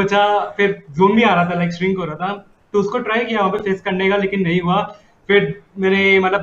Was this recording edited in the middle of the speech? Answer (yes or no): no